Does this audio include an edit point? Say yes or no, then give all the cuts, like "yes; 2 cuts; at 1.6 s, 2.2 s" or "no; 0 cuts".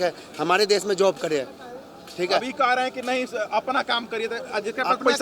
no; 0 cuts